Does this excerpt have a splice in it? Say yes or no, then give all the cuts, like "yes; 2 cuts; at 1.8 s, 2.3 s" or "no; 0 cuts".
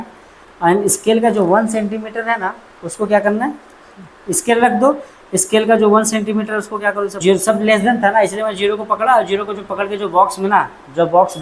yes; 1 cut; at 7.2 s